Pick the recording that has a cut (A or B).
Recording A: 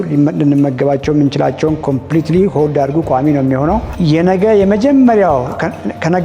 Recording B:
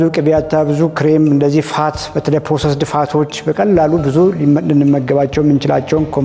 A